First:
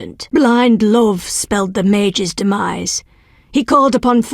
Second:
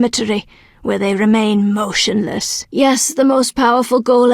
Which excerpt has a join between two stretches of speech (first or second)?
second